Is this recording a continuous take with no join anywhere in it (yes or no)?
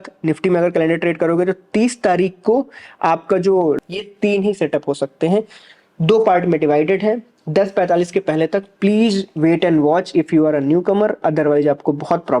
no